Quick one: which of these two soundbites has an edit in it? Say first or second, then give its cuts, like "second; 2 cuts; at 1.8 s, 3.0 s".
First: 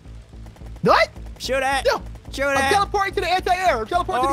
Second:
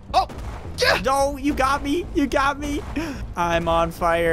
second; 1 cut; at 3.3 s